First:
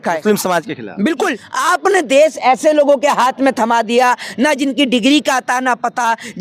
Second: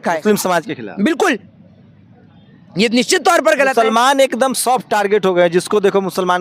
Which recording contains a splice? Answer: first; 1 cut; at 1.5 s

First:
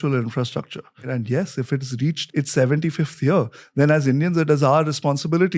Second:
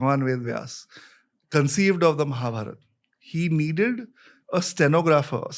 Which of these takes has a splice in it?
first; 2 cuts; at 1.0 s, 2.2 s

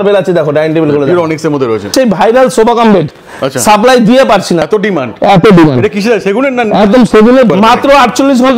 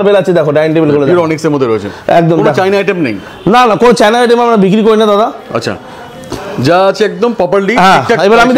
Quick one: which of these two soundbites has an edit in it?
first; 3 cuts; at 1.9 s, 4.6 s, 7.5 s

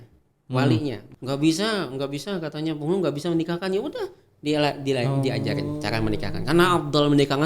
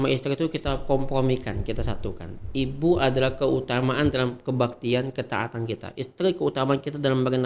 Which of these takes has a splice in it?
first; 1 cut; at 1.0 s

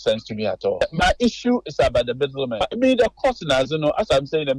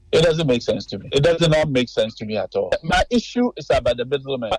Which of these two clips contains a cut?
second; 1 cut; at 0.9 s

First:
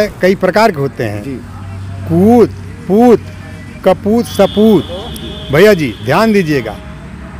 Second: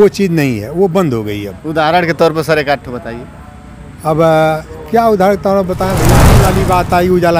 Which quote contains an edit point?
second; 1 cut; at 6.3 s

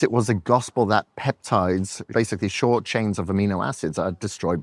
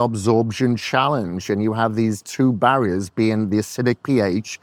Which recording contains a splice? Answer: first; 1 cut; at 2.0 s

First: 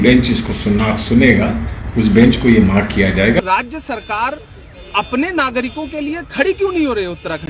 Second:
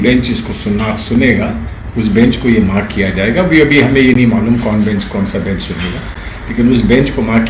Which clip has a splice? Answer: first; 1 cut; at 3.4 s

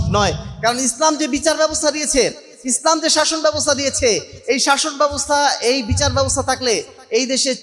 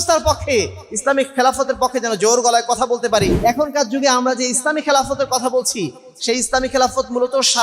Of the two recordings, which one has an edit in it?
second; 1 cut; at 3.3 s

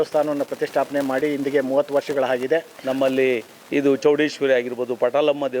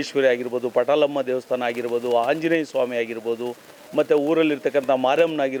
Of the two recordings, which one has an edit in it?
first; 1 cut; at 2.7 s

